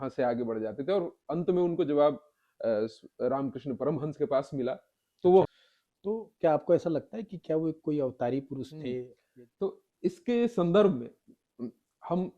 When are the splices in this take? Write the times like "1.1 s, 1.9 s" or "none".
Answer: 5.5 s, 9.2 s